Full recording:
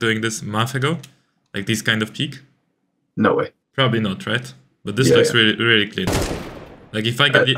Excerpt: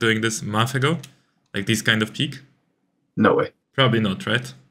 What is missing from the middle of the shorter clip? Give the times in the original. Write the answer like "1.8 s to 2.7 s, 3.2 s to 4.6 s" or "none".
none